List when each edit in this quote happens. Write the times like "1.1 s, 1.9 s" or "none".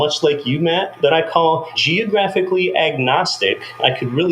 0.9 s, 1.8 s